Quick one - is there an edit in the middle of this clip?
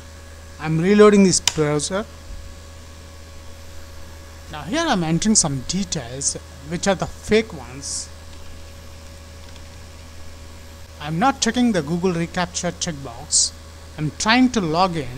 yes; 1 cut; at 4.5 s

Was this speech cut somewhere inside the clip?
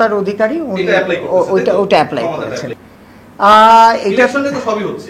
yes; 1 cut; at 2.8 s

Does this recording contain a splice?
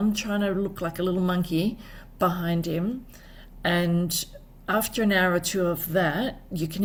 no; 0 cuts

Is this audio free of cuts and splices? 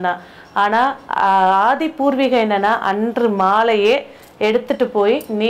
yes; 0 cuts

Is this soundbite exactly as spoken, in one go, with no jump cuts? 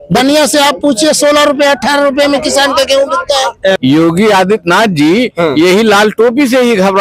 no; 1 cut; at 3.8 s

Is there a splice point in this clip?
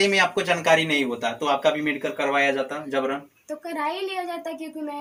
no; 0 cuts

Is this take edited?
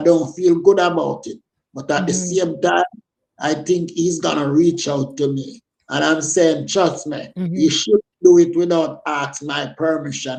no; 0 cuts

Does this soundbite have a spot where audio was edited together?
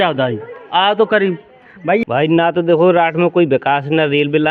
yes; 1 cut; at 2.0 s

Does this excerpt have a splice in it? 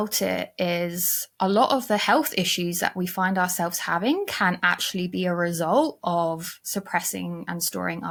no; 0 cuts

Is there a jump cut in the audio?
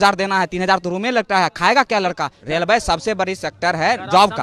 yes; 1 cut; at 2.3 s

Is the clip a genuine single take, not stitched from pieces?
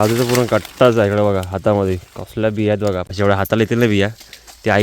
no; 1 cut; at 3.1 s

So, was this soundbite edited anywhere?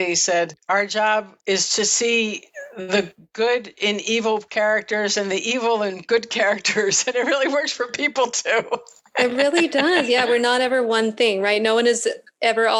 no; 0 cuts

